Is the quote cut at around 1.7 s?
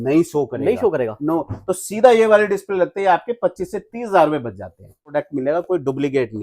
no; 1 cut; at 5.1 s

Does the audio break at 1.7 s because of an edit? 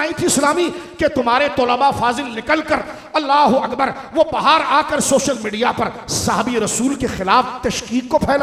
no; 0 cuts

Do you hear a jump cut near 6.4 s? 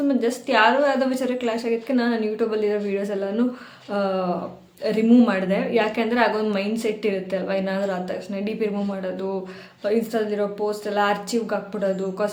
no; 0 cuts

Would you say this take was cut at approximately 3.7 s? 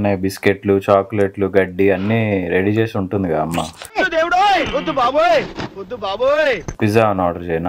no; 1 cut; at 6.7 s

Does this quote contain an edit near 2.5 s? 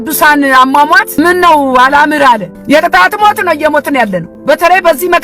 yes; 3 cuts; at 1.2 s, 2.5 s, 4.3 s

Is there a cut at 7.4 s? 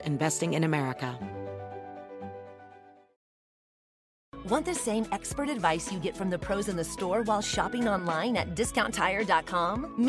no; 1 cut; at 1.1 s

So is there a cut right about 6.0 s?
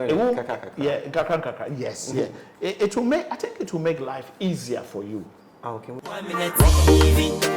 yes; 1 cut; at 6.0 s

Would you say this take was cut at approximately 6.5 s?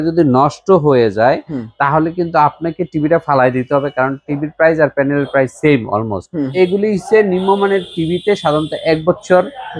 yes; 1 cut; at 6.5 s

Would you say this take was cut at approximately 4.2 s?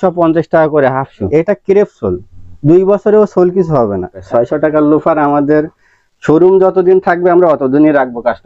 yes; 2 cuts; at 1.3 s, 4.2 s

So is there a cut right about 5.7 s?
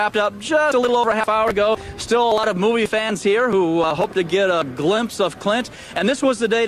no; 1 cut; at 1.9 s

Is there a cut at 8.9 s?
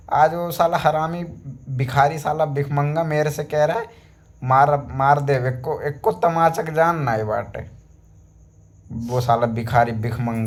no; 0 cuts

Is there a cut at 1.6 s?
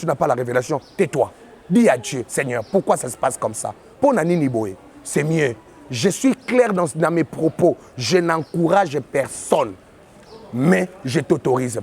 no; 0 cuts

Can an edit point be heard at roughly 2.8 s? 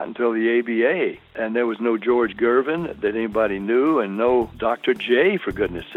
no; 2 cuts; at 1.3 s, 4.5 s

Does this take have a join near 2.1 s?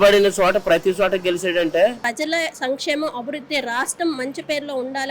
yes; 1 cut; at 2.1 s

